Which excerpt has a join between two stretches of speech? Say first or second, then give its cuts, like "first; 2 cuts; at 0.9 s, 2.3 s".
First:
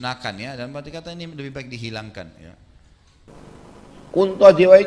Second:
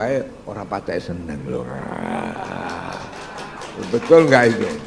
first; 1 cut; at 3.3 s